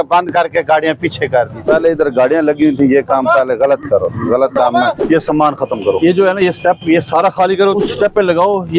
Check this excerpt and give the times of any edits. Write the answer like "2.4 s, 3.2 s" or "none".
1.6 s, 4.9 s, 7.8 s